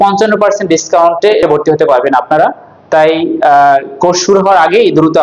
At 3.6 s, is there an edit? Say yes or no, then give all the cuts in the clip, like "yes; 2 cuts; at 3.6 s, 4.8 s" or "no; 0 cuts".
no; 1 cut; at 1.4 s